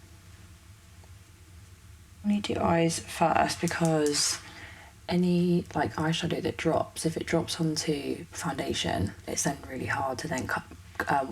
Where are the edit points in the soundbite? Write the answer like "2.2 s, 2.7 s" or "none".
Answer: 2.3 s